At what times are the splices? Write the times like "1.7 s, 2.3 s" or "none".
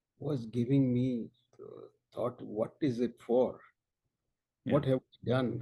none